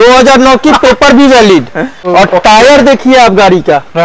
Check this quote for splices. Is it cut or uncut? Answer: cut